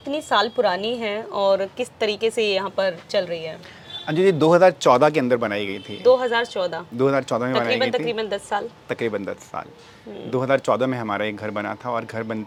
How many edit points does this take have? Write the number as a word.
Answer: zero